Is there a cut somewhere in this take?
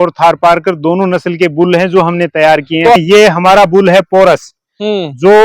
yes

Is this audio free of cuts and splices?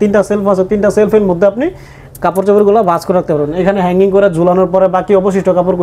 yes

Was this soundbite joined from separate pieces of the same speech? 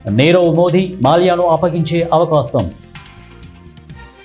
no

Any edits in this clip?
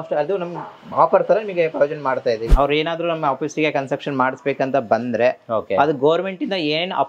yes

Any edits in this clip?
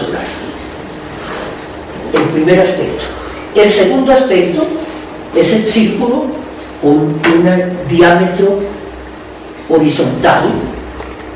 yes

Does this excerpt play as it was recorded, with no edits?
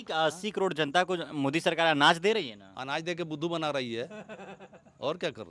yes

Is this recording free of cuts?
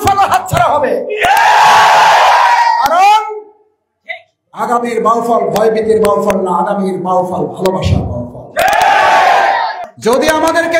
no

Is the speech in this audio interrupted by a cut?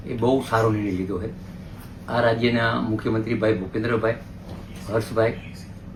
no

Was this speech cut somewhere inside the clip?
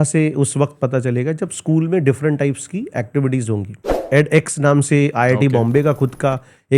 yes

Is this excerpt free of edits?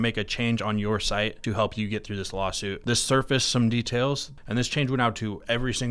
no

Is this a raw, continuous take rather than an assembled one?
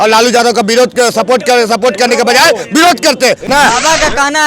no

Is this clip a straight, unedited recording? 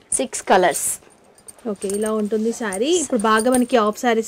yes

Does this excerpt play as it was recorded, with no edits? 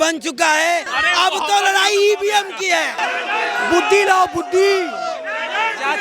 no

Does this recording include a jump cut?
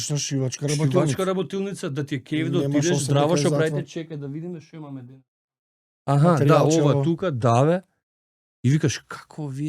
no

